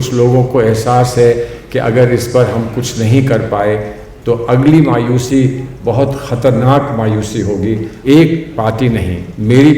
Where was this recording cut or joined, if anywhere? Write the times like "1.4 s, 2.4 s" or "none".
7.9 s